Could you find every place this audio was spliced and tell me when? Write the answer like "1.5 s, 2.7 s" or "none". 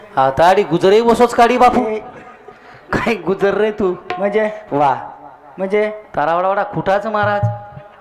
none